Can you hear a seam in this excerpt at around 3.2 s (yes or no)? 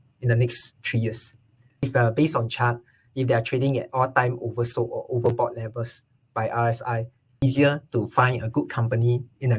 no